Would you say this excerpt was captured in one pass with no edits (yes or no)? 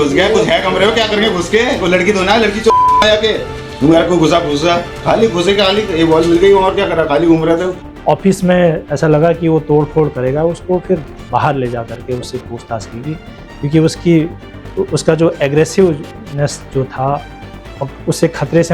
yes